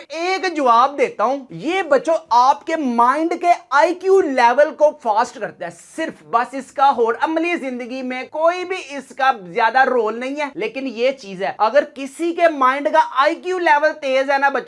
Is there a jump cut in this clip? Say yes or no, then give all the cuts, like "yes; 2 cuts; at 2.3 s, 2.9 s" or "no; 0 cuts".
no; 0 cuts